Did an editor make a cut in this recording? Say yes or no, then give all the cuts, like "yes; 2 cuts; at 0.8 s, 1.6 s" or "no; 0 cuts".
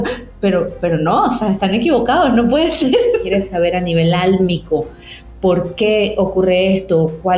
yes; 1 cut; at 3.2 s